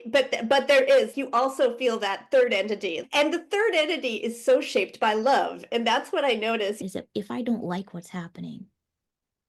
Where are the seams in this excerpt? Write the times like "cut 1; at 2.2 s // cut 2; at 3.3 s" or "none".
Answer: cut 1; at 1.1 s // cut 2; at 3.0 s // cut 3; at 6.8 s